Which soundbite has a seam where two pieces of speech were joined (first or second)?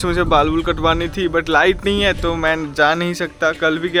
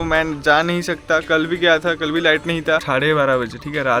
second